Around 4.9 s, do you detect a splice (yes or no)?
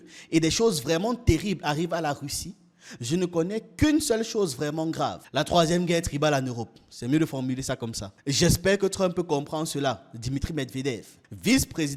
no